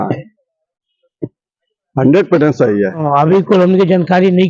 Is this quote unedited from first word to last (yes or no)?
no